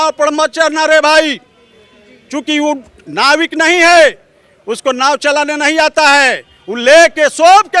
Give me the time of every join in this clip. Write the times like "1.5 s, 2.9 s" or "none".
none